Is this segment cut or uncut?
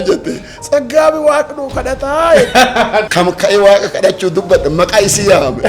cut